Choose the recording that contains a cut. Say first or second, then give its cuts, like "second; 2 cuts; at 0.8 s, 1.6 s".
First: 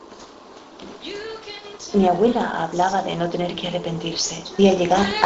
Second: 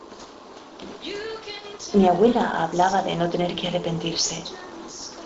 second; 1 cut; at 4.3 s